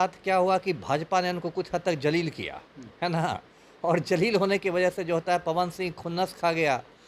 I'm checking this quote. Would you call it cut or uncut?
uncut